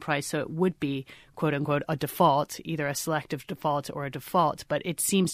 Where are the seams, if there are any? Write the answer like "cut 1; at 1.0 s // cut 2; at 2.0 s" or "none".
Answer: none

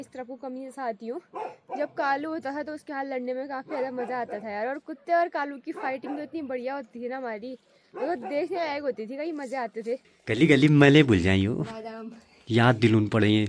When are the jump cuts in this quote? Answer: cut 1; at 10.1 s

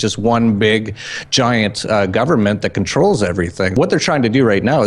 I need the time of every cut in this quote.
cut 1; at 3.7 s

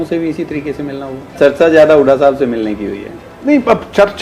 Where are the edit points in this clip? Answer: cut 1; at 1.3 s

